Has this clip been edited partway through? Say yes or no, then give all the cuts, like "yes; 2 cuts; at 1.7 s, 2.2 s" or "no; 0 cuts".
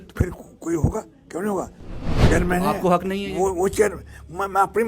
yes; 1 cut; at 2.3 s